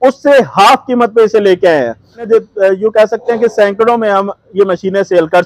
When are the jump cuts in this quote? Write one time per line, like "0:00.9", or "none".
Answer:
0:02.2